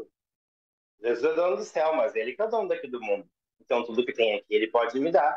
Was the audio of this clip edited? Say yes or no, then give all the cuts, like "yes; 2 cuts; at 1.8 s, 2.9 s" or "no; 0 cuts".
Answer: no; 0 cuts